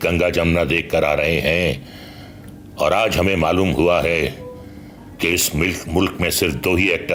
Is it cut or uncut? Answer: uncut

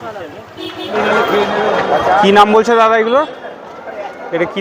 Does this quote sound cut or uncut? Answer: cut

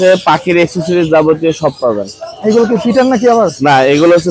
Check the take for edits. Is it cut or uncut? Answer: uncut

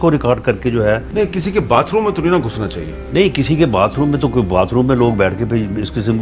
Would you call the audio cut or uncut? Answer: cut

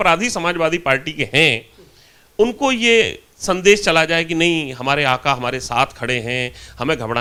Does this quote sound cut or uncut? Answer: uncut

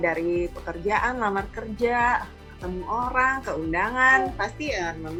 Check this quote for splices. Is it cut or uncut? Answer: uncut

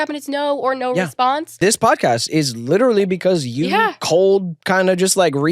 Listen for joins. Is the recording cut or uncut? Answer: cut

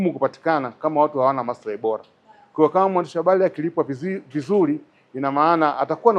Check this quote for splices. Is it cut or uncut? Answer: uncut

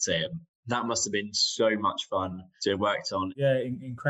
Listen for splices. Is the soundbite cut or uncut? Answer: cut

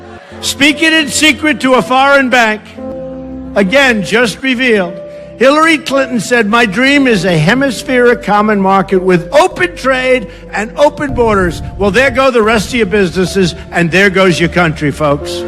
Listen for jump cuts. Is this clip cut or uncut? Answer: cut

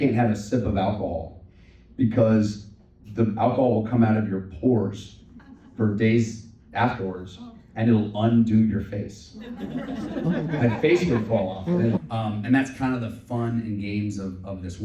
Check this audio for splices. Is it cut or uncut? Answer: cut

